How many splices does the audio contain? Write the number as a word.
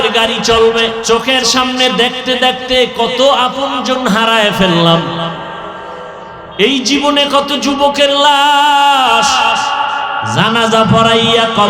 one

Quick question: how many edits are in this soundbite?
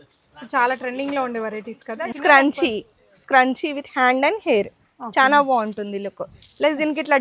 one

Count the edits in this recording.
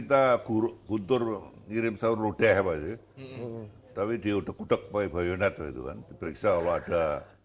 zero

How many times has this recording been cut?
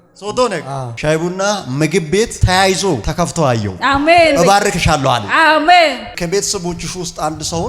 two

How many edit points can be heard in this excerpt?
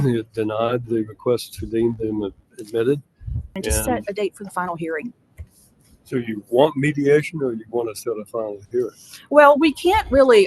one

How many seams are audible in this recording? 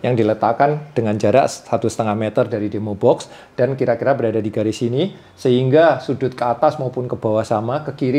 zero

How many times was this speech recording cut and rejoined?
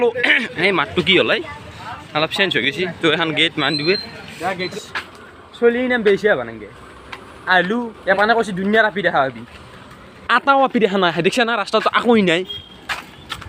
one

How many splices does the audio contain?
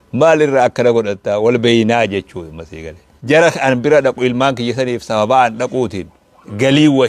one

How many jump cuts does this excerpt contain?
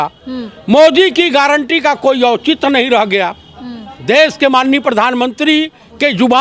zero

